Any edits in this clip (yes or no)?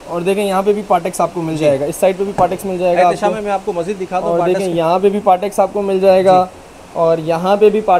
no